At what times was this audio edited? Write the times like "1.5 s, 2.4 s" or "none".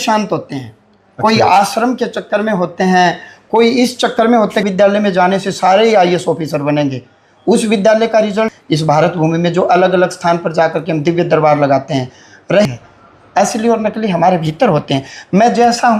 4.6 s, 8.5 s, 12.6 s